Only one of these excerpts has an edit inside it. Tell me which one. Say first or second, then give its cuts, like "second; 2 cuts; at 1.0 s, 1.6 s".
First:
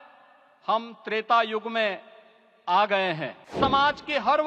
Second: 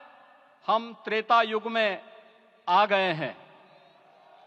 first; 1 cut; at 3.5 s